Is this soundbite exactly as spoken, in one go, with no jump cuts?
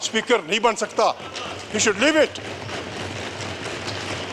yes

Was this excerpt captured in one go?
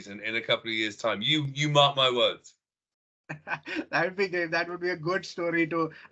yes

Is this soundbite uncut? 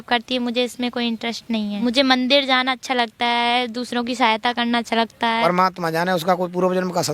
no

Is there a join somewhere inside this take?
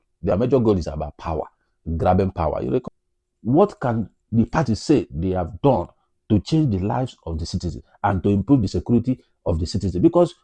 yes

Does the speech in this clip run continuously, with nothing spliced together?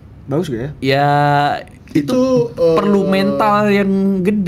yes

